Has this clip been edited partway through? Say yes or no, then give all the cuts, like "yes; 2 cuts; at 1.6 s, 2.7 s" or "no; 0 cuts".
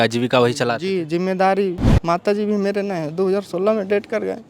yes; 1 cut; at 1.9 s